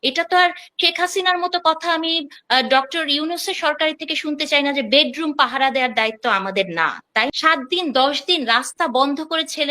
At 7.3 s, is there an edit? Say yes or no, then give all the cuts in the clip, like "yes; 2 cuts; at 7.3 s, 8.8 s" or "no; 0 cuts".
yes; 1 cut; at 7.3 s